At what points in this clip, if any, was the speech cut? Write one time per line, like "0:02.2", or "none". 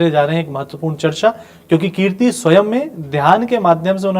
none